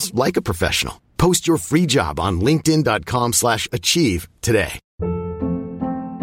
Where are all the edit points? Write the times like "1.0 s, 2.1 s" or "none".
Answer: 4.8 s